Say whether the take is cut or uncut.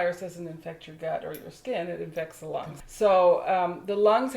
cut